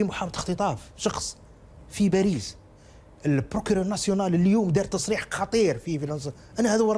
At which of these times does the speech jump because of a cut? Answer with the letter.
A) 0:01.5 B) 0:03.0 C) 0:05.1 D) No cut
D